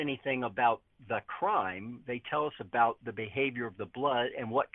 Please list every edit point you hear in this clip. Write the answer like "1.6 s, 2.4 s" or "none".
none